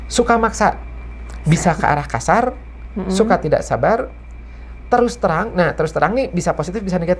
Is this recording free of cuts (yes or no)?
yes